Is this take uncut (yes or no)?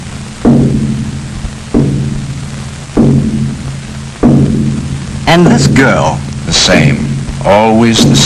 yes